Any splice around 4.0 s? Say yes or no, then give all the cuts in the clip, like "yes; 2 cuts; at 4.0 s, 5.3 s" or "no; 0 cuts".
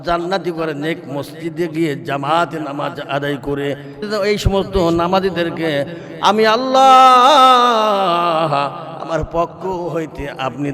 yes; 1 cut; at 4.0 s